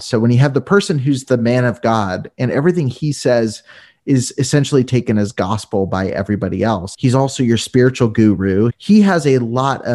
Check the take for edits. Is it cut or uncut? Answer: cut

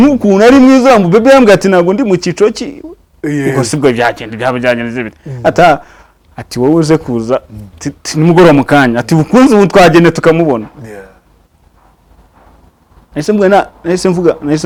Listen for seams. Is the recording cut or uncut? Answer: uncut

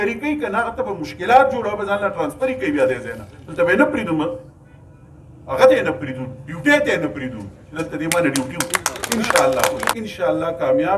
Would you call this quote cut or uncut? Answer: uncut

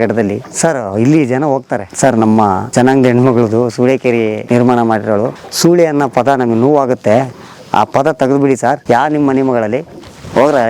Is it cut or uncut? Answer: cut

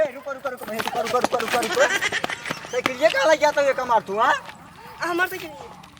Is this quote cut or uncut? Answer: uncut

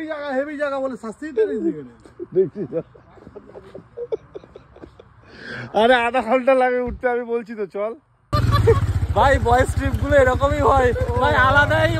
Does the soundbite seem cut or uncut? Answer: cut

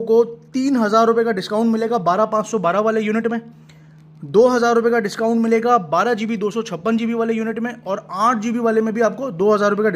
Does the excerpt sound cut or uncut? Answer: uncut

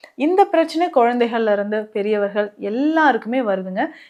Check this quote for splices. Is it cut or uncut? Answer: uncut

